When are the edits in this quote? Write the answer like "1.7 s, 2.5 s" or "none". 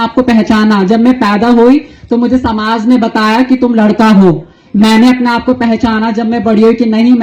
none